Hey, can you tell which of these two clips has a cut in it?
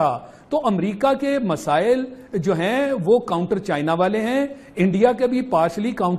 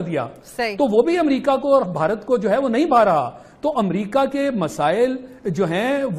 second; 1 cut; at 2.0 s

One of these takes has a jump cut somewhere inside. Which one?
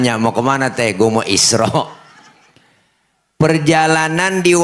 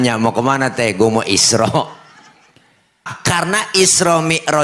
second; 1 cut; at 3.1 s

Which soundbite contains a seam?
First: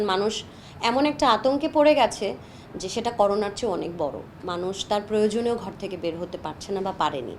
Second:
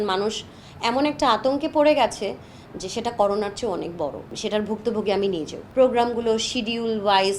second; 2 cuts; at 4.3 s, 5.6 s

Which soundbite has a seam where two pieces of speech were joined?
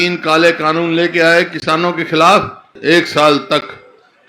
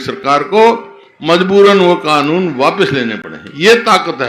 first; 1 cut; at 2.7 s

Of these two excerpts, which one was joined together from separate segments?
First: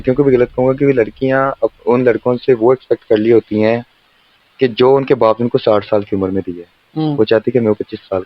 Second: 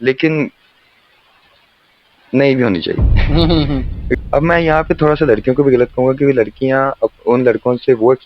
second; 1 cut; at 4.2 s

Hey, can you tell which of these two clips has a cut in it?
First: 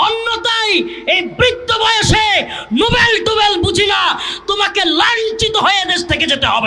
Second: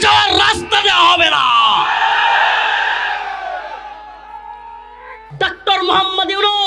second; 1 cut; at 5.2 s

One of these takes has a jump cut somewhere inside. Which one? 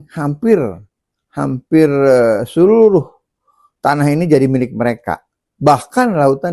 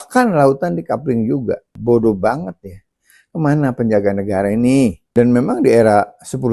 second; 2 cuts; at 1.8 s, 5.0 s

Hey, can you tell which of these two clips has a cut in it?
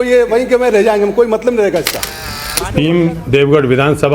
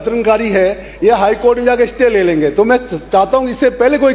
first; 1 cut; at 2.1 s

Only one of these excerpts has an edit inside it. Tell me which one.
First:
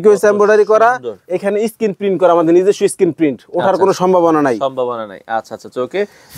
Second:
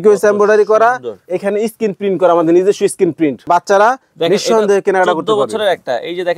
second; 1 cut; at 3.5 s

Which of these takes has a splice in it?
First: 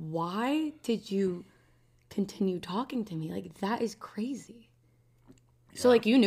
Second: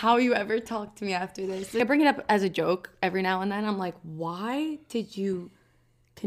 second; 1 cut; at 1.8 s

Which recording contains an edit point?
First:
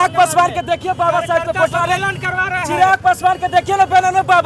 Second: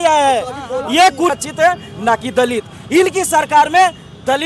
second; 1 cut; at 1.3 s

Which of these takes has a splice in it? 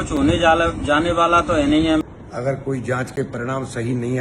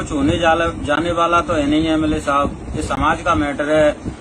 first; 1 cut; at 2.0 s

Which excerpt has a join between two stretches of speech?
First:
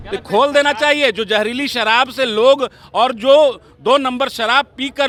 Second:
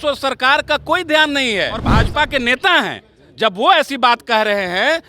second; 1 cut; at 2.0 s

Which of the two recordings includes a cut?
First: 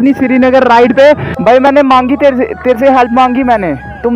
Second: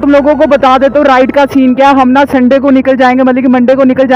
first; 1 cut; at 1.3 s

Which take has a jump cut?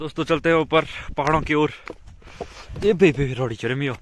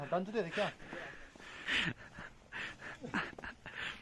second; 1 cut; at 1.6 s

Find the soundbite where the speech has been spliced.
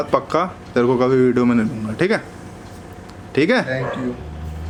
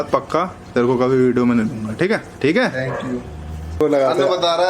second; 2 cuts; at 2.3 s, 3.8 s

